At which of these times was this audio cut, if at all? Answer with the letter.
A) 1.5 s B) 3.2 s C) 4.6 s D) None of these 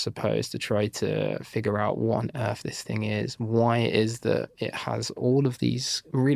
D